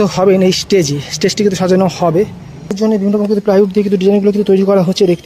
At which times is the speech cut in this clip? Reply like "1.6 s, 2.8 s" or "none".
2.8 s